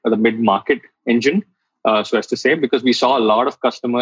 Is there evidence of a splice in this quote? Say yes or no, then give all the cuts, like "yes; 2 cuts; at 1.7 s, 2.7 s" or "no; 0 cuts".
no; 0 cuts